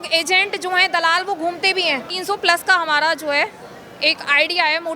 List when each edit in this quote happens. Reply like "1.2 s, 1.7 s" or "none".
2.1 s